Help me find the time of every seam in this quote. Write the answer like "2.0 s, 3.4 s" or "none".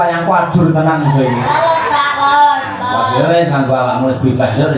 none